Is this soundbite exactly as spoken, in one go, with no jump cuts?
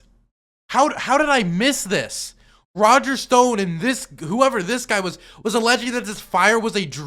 yes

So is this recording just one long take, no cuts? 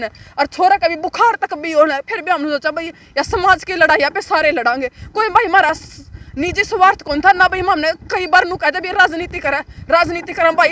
yes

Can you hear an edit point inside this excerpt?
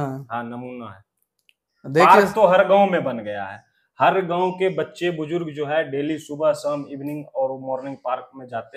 no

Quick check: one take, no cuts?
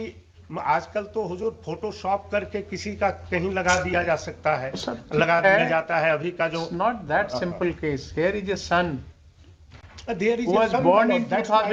yes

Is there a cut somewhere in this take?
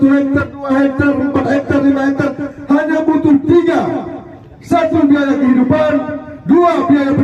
no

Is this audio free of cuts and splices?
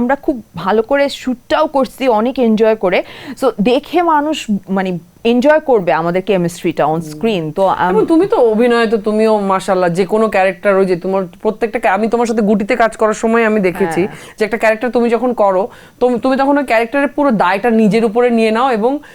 yes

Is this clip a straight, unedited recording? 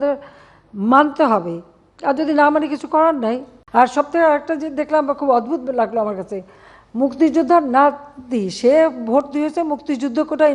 no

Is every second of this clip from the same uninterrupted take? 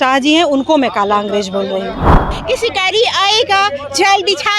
no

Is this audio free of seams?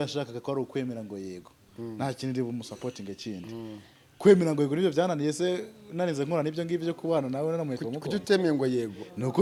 yes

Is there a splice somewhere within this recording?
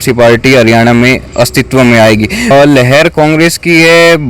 yes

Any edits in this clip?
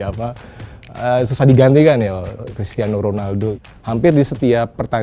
yes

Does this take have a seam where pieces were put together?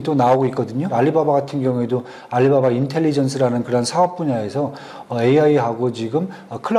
yes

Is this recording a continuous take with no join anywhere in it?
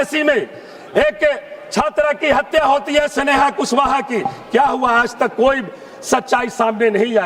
yes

